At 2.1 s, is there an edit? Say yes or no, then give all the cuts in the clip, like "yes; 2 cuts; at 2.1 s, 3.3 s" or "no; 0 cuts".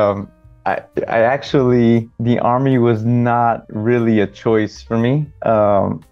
yes; 1 cut; at 2.1 s